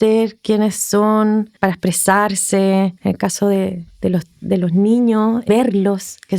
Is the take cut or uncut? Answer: cut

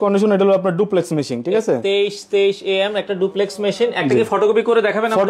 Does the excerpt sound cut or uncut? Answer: uncut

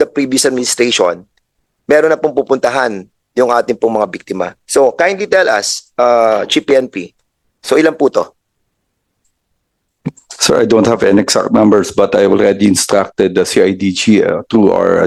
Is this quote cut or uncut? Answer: uncut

